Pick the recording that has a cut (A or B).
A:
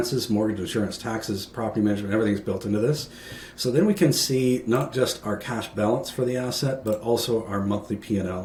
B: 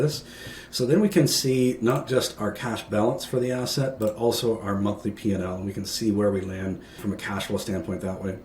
B